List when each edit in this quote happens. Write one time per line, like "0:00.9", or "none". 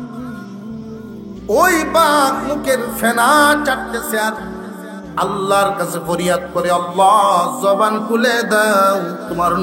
0:01.1